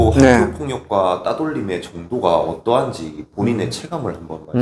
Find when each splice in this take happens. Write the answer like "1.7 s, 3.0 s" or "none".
none